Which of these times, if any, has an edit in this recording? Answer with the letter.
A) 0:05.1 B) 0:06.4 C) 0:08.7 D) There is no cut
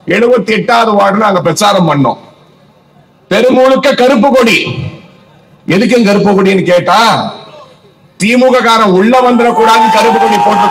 D